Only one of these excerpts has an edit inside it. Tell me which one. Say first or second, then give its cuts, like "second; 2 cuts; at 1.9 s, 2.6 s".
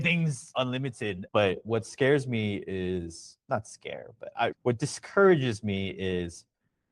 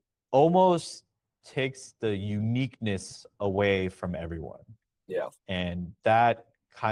first; 1 cut; at 1.2 s